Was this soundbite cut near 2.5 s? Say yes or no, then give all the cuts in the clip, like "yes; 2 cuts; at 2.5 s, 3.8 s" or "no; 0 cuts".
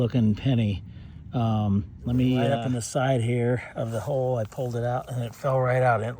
yes; 1 cut; at 2.5 s